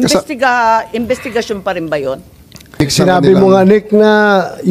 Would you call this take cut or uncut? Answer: cut